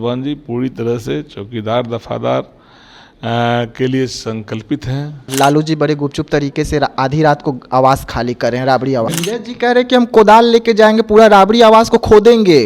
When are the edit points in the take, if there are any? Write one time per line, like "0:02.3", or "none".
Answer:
0:05.3
0:09.1